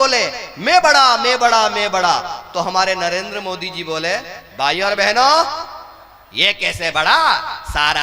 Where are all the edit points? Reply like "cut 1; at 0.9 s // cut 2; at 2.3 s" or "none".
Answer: none